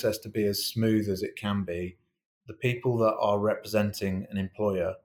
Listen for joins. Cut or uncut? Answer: uncut